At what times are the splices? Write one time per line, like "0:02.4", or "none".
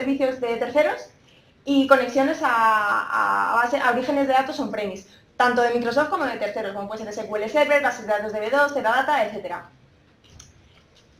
0:05.3